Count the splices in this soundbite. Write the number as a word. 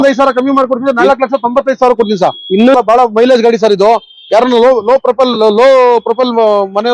one